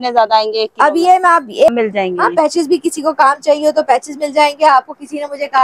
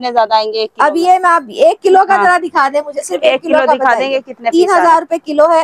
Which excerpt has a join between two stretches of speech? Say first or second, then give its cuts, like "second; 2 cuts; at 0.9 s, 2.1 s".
first; 1 cut; at 1.7 s